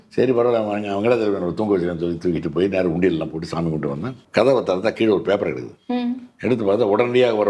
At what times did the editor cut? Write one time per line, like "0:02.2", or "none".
0:04.1